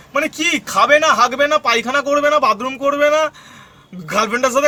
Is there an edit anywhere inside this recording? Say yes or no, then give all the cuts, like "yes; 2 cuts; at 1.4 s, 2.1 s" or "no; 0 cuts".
no; 0 cuts